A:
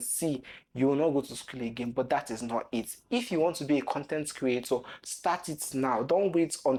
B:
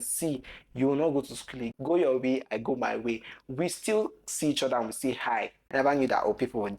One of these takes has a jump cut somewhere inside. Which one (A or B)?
B